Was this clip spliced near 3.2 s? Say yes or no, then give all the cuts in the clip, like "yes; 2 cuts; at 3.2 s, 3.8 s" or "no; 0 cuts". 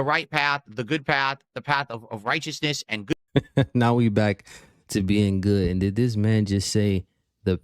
yes; 1 cut; at 3.2 s